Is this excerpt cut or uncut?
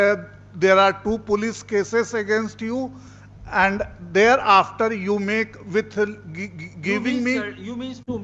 uncut